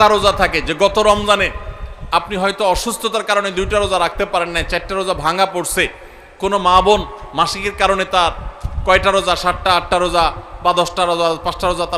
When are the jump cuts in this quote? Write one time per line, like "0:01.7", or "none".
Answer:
none